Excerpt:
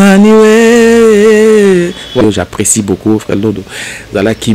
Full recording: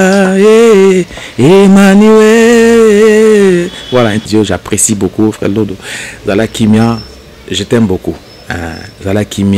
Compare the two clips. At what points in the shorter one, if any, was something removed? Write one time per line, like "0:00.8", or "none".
0:02.2